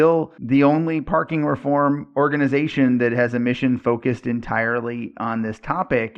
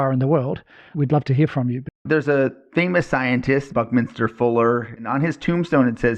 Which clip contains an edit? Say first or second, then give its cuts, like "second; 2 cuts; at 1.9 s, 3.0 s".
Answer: second; 3 cuts; at 2.0 s, 3.7 s, 5.1 s